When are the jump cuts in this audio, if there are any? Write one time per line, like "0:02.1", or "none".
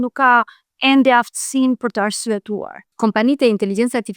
0:02.9